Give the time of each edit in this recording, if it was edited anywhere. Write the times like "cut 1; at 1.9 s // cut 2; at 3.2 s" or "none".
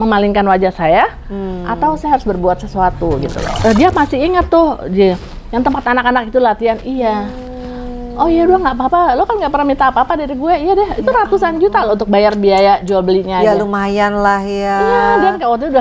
cut 1; at 3.6 s